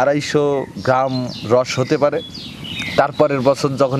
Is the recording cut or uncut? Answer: uncut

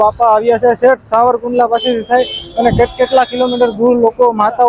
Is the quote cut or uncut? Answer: uncut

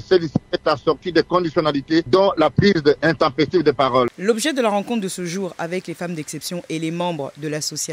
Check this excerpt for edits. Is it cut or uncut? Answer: cut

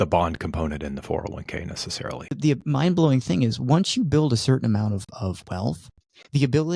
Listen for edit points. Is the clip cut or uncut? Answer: cut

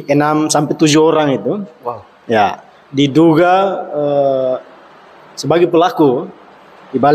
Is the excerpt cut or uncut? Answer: uncut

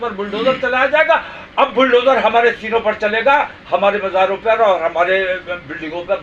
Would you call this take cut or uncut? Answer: uncut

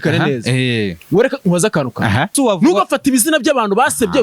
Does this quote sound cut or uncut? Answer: cut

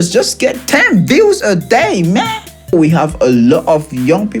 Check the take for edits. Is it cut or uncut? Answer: cut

